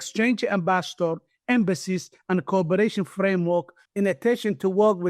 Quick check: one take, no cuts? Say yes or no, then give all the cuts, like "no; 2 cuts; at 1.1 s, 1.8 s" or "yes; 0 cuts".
no; 1 cut; at 3.8 s